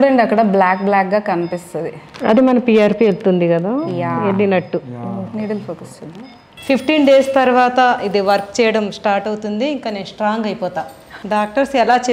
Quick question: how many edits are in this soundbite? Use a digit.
2